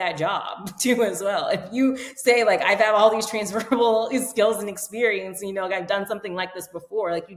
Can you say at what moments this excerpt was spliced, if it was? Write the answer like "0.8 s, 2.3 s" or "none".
none